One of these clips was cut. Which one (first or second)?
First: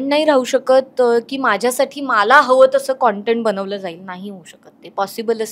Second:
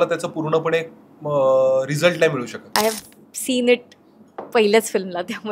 second